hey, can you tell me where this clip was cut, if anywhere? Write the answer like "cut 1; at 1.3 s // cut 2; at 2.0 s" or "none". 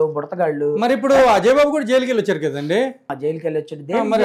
none

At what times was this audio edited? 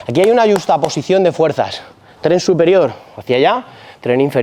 none

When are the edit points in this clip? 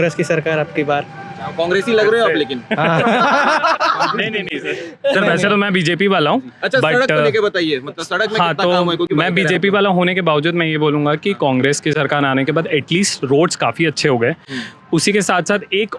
none

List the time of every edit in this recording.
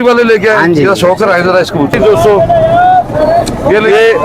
cut 1; at 2.0 s

